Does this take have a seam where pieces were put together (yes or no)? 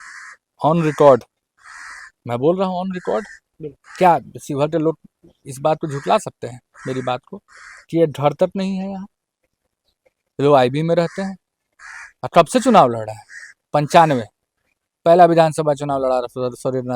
no